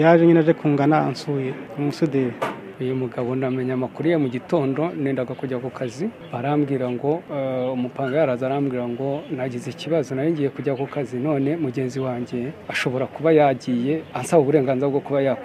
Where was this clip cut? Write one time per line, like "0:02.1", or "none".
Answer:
0:01.6
0:02.7
0:06.2
0:07.3
0:12.6
0:14.1